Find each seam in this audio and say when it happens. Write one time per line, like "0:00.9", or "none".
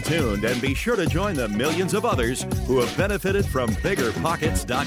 none